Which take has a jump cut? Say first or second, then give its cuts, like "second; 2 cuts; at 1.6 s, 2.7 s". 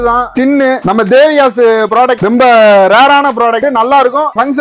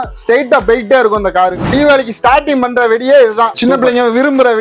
second; 1 cut; at 1.6 s